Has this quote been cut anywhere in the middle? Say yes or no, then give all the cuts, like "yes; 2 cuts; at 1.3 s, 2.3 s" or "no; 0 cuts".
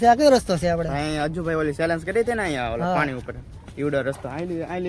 no; 0 cuts